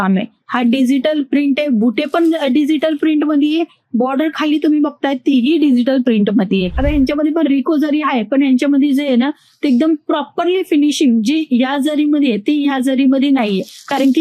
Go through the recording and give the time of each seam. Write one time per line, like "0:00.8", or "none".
0:06.7